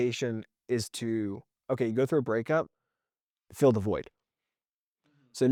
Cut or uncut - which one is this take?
uncut